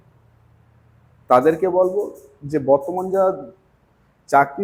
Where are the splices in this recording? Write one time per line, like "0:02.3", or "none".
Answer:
none